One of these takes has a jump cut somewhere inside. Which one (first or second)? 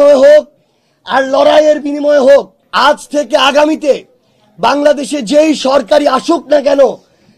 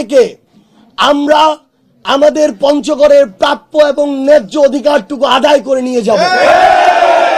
first